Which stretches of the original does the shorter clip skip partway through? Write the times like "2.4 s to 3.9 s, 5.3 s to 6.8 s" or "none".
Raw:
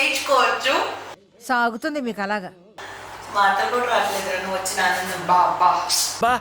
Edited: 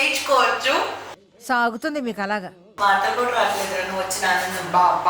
2.6 s to 3.1 s